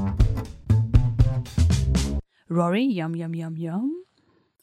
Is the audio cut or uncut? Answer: cut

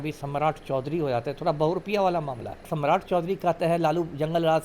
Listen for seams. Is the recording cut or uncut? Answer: cut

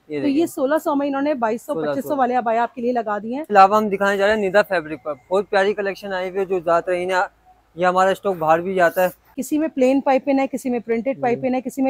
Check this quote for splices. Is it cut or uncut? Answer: cut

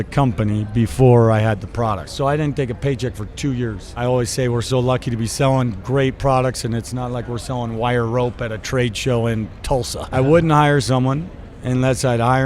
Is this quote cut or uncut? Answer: cut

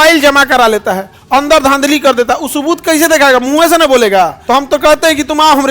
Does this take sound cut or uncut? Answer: cut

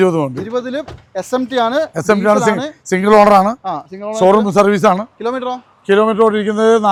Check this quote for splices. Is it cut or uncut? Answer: uncut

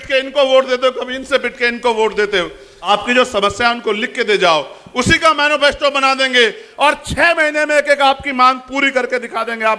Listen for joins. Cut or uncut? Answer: cut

